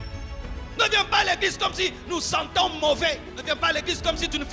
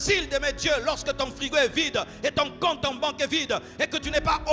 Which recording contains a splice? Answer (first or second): first